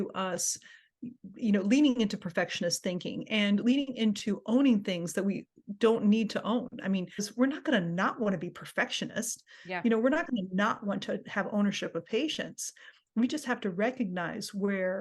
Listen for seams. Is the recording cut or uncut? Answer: cut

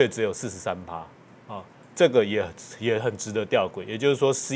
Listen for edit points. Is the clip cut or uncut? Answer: uncut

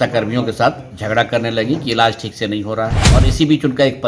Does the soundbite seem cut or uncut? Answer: cut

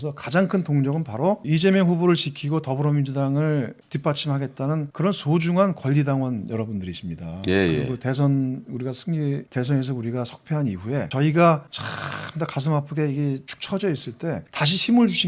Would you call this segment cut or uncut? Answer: uncut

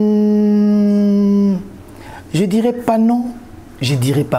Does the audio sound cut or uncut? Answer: uncut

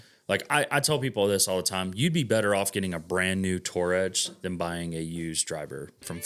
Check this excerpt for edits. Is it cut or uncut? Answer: uncut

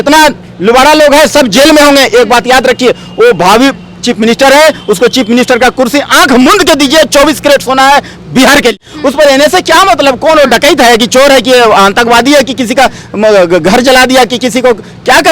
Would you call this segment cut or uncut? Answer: cut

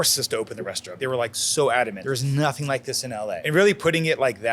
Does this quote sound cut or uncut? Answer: cut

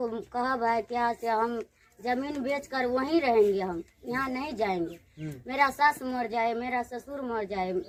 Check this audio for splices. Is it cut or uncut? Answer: uncut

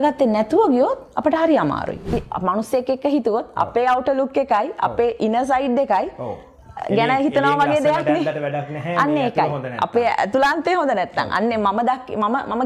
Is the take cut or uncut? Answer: cut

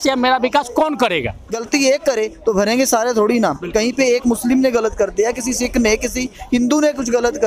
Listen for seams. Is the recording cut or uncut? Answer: cut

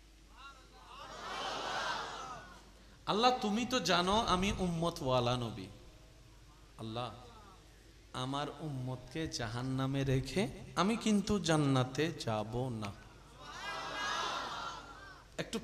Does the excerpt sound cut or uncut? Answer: uncut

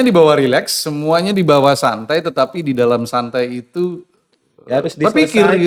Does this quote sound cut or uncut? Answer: uncut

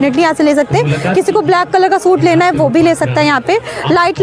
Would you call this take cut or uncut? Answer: uncut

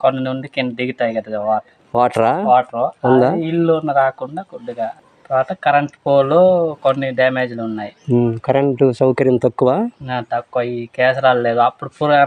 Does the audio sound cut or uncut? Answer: uncut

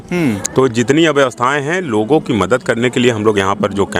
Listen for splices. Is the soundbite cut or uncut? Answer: uncut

